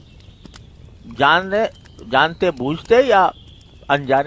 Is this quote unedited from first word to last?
no; 1 cut; at 1.0 s

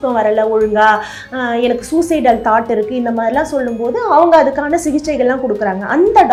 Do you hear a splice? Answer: no; 0 cuts

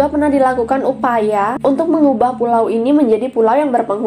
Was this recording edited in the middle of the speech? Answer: no; 0 cuts

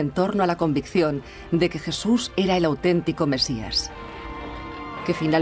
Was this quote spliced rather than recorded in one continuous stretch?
yes; 1 cut; at 1.9 s

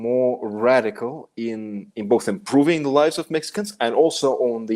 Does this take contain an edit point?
no; 0 cuts

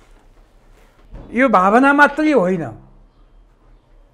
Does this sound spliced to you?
yes; 1 cut; at 0.9 s

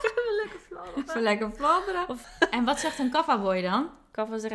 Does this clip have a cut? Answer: yes; 1 cut; at 2.2 s

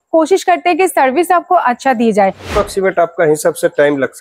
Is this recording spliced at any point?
yes; 1 cut; at 2.5 s

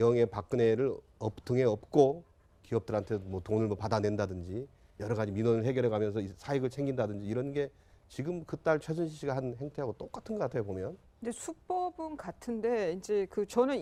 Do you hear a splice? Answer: no; 0 cuts

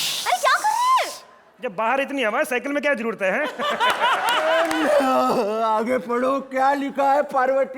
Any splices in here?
yes; 1 cut; at 4.5 s

